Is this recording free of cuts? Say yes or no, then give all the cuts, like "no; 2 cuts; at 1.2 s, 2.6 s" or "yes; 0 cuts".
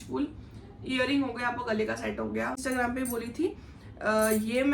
no; 1 cut; at 2.6 s